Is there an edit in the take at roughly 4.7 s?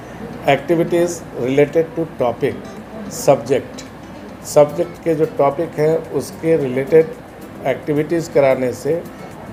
no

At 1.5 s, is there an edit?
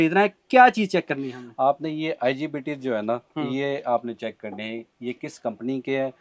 no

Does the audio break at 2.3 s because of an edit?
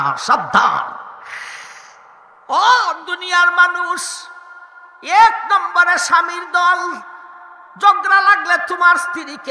yes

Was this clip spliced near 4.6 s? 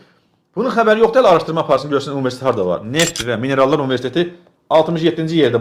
no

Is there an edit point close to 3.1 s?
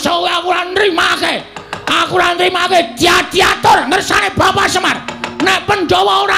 no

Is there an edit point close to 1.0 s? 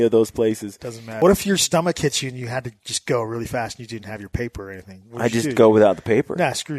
yes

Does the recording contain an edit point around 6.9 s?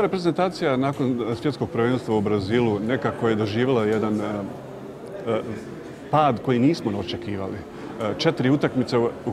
no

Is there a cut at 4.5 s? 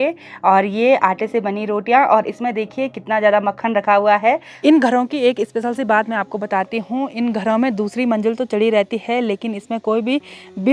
yes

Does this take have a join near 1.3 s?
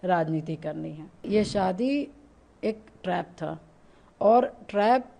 yes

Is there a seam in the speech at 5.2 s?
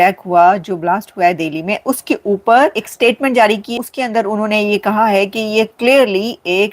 no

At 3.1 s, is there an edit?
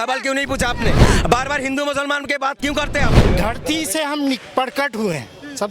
yes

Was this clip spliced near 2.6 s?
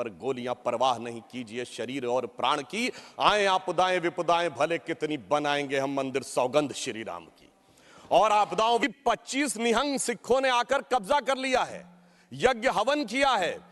no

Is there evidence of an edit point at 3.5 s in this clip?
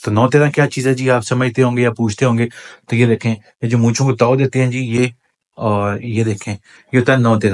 no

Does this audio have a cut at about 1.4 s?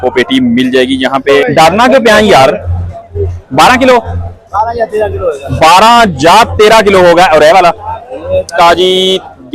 yes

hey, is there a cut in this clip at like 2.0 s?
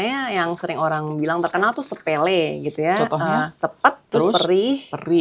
no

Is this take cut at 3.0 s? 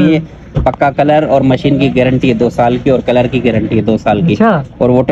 no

